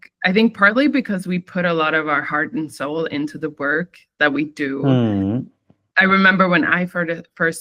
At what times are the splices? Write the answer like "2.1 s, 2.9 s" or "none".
none